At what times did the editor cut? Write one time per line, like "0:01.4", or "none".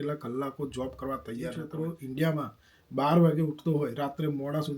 0:01.6